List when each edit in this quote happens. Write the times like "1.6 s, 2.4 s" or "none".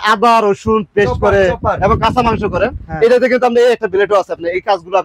none